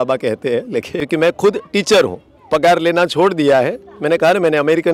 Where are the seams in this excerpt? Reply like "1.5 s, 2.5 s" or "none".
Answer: 1.0 s